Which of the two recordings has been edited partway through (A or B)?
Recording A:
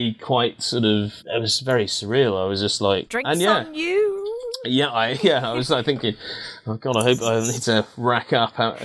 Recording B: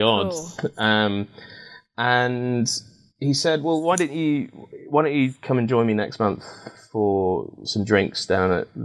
A